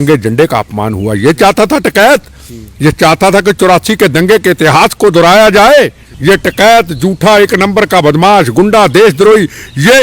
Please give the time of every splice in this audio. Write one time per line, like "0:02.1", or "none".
0:06.1

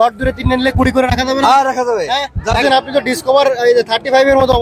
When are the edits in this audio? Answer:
0:02.6

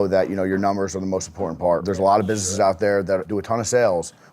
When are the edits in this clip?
0:01.8
0:03.3

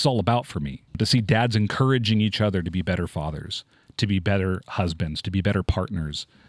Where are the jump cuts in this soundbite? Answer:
0:01.0

